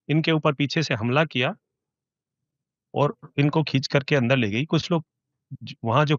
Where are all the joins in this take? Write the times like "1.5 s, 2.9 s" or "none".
none